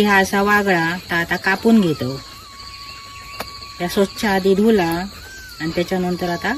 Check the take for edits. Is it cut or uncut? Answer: uncut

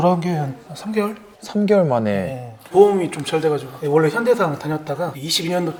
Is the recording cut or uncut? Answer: uncut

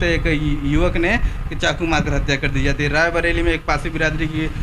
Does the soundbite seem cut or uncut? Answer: uncut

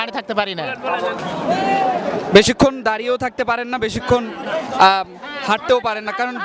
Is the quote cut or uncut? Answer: cut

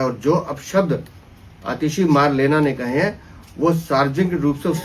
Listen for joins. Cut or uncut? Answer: uncut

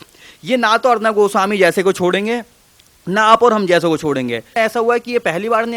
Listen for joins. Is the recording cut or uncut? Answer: cut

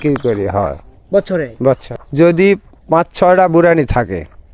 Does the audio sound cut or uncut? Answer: cut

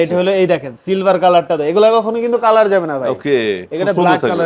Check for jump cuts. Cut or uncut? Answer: uncut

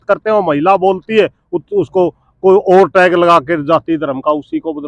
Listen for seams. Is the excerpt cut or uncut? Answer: uncut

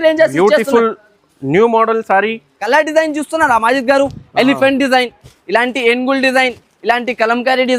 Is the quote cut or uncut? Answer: cut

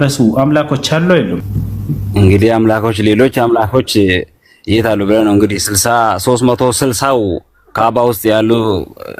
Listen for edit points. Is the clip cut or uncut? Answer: cut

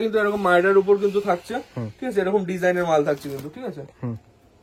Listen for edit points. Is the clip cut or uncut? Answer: uncut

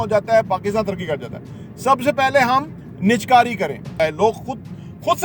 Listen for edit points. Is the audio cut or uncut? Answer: cut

